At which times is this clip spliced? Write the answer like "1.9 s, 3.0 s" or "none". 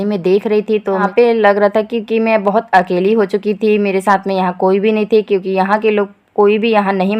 1.1 s